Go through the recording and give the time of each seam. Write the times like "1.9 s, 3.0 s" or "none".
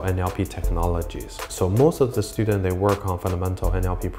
1.5 s